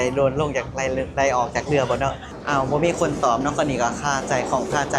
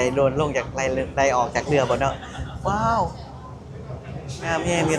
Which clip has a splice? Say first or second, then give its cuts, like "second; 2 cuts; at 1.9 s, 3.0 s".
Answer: first; 1 cut; at 2.3 s